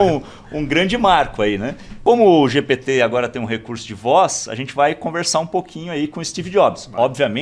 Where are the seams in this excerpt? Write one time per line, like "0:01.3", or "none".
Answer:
0:01.9